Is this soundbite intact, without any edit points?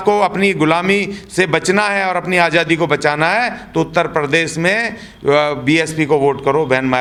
yes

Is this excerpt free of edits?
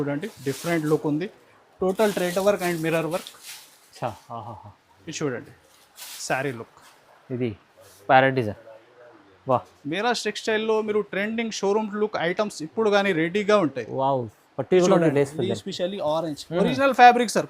no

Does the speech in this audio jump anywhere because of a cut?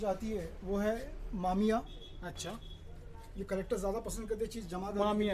no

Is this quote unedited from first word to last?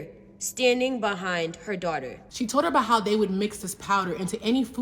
no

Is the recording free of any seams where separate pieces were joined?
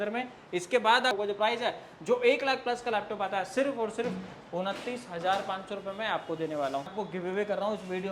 no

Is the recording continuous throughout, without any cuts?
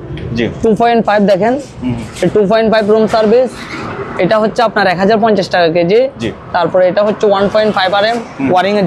yes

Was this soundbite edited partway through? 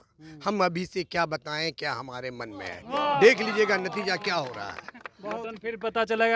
no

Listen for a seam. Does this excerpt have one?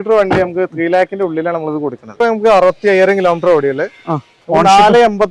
yes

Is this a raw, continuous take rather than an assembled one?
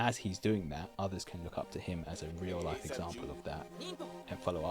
yes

